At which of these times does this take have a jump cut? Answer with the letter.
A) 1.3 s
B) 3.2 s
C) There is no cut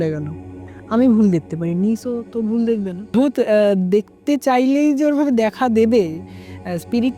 B